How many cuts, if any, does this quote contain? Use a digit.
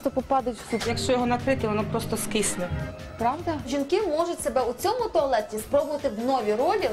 2